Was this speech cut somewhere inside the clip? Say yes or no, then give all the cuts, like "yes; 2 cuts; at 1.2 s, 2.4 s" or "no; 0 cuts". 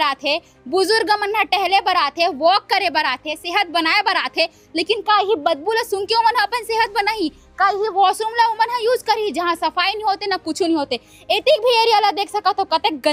no; 0 cuts